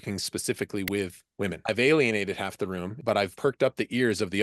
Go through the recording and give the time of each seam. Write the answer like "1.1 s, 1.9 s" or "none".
1.6 s, 3.2 s